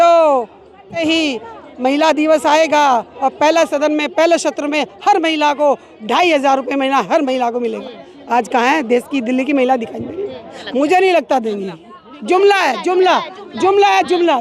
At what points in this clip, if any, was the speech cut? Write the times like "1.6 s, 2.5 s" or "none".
1.0 s, 10.5 s